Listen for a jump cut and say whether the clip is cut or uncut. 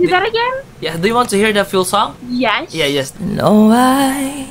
cut